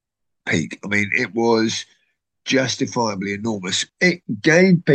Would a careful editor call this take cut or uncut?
cut